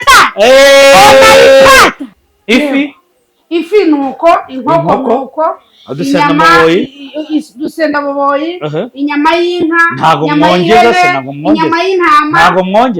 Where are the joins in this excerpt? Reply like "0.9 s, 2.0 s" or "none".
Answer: 2.0 s